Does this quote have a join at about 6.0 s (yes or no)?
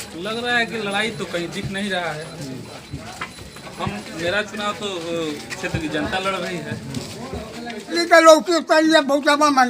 no